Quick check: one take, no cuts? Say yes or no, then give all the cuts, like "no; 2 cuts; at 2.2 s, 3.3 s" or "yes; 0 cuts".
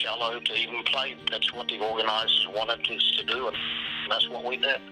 no; 1 cut; at 1.2 s